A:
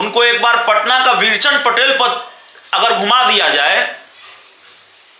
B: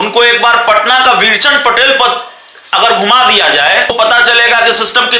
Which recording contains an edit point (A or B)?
B